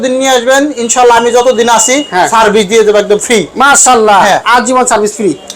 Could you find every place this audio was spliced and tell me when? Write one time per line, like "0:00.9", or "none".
none